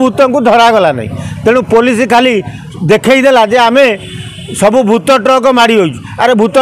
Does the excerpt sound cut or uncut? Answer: uncut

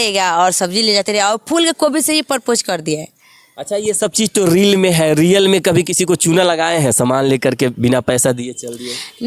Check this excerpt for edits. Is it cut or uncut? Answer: uncut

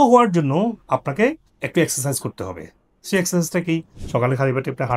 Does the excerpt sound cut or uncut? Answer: uncut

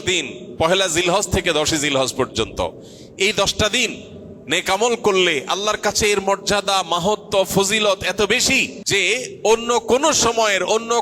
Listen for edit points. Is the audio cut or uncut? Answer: cut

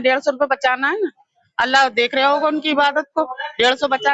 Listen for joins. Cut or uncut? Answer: uncut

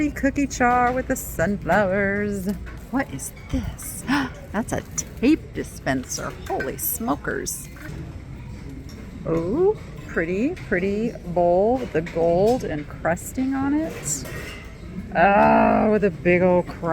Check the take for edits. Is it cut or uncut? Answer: cut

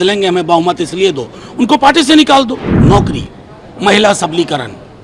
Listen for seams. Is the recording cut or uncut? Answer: cut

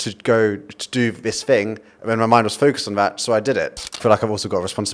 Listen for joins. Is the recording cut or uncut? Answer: cut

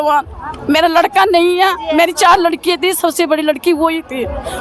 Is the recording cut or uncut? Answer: uncut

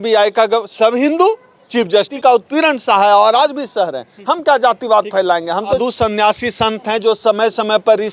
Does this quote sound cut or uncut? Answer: cut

